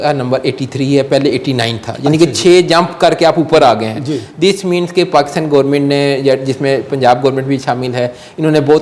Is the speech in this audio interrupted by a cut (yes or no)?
no